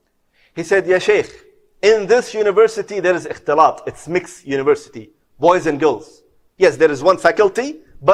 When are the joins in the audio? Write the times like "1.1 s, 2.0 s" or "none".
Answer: none

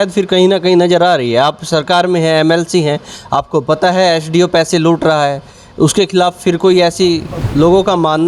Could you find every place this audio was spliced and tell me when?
7.4 s

